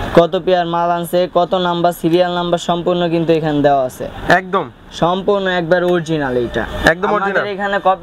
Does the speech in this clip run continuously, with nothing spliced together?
yes; 0 cuts

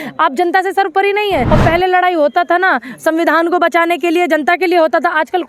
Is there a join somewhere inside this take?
yes; 1 cut; at 1.5 s

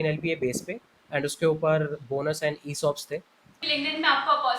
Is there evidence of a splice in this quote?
yes; 1 cut; at 3.4 s

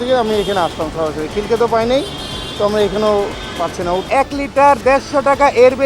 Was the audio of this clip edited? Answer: yes; 1 cut; at 4.0 s

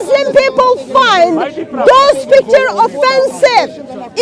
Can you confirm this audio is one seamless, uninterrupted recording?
yes; 0 cuts

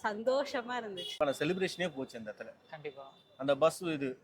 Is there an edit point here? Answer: yes; 1 cut; at 1.1 s

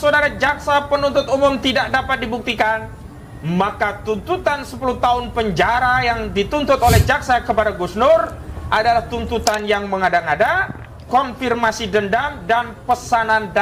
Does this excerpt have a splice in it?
no; 0 cuts

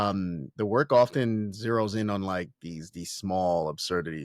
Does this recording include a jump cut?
no; 0 cuts

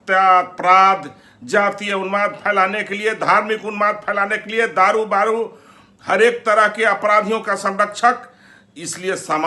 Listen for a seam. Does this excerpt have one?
no; 0 cuts

